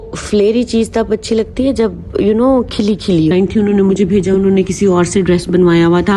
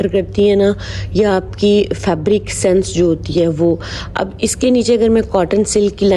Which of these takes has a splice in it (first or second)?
first